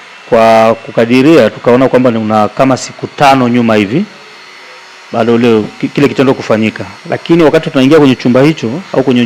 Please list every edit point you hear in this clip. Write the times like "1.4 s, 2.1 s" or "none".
none